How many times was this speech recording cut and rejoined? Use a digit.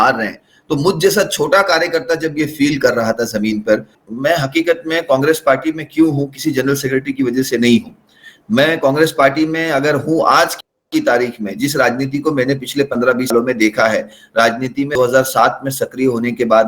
1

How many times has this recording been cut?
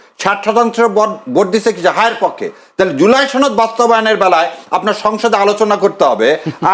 0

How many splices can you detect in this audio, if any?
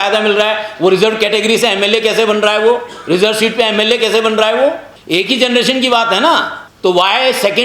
2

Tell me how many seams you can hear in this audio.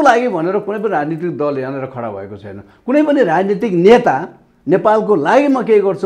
0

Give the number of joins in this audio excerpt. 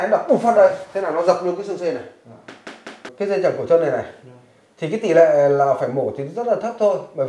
1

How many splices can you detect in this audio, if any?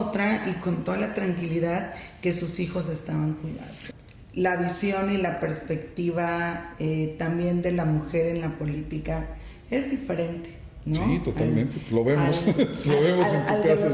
1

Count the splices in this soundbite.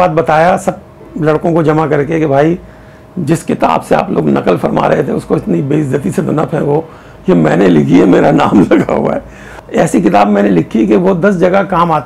1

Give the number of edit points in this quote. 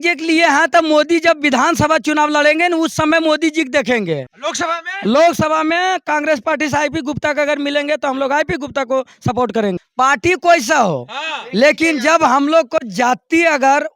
2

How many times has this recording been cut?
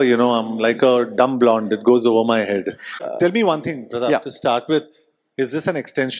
1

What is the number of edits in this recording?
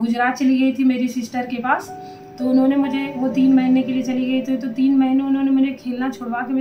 0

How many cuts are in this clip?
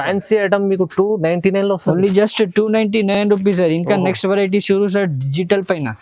0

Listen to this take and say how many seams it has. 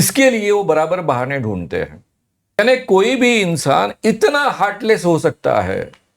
1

